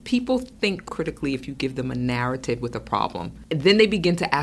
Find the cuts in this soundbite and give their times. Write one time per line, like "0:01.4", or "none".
0:00.9
0:03.3